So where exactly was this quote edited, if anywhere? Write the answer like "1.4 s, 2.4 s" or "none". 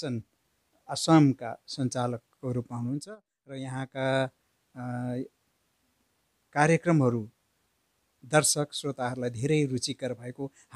none

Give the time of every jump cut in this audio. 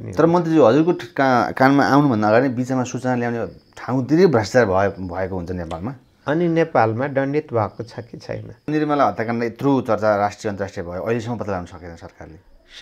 8.7 s

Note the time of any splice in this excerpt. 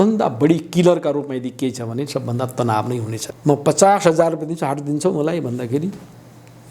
3.2 s

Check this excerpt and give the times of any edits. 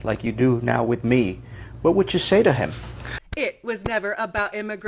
3.2 s

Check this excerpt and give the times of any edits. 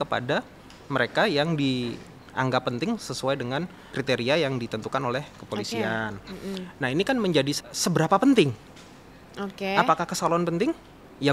3.9 s, 7.6 s

